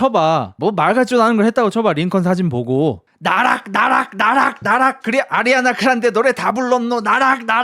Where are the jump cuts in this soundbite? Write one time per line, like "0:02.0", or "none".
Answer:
0:03.1